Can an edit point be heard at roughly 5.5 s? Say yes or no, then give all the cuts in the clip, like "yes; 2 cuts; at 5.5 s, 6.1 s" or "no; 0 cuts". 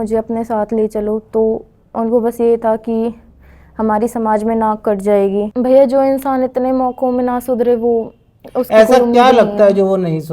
yes; 1 cut; at 5.5 s